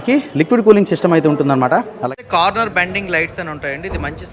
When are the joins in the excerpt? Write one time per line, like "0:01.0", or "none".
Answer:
0:02.2